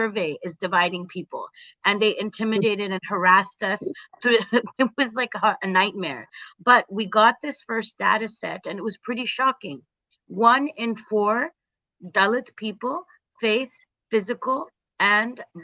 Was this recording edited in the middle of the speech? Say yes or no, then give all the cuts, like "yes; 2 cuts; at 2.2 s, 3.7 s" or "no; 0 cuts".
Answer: no; 0 cuts